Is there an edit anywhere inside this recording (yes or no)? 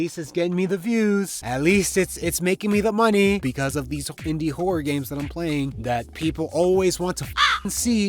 yes